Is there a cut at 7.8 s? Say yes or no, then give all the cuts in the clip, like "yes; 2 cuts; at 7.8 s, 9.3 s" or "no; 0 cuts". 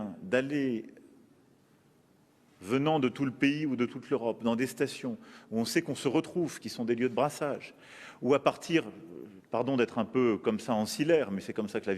yes; 1 cut; at 7.8 s